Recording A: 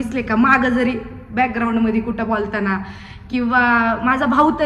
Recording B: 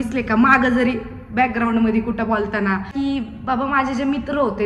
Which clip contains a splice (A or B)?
B